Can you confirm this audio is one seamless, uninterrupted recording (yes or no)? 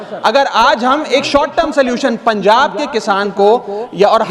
yes